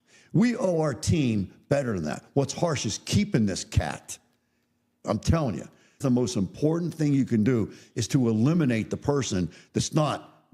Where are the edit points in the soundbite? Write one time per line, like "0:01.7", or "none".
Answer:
0:05.0
0:06.0